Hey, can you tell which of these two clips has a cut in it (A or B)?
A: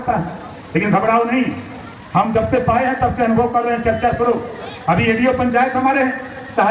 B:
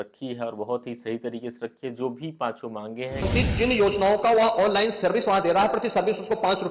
B